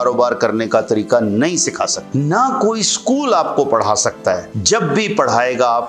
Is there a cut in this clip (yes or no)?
yes